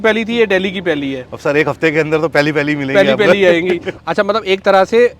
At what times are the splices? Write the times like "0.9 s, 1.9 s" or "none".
3.9 s